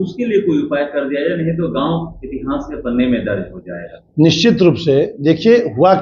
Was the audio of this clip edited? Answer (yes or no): no